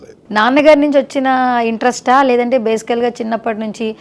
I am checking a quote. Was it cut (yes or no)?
no